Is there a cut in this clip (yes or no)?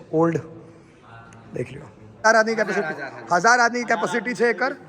yes